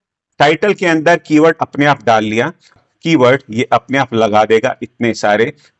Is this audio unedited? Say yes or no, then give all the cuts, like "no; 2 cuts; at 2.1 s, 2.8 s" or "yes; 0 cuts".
no; 1 cut; at 2.8 s